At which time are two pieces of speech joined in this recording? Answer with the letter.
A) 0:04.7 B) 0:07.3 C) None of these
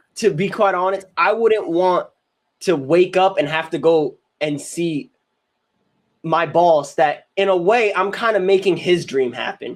C